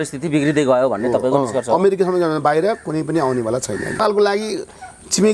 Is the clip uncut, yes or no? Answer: no